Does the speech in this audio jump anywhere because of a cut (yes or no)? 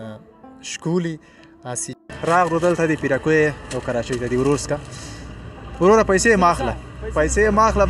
yes